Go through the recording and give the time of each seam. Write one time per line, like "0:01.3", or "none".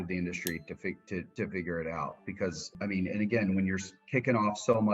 0:01.3
0:02.8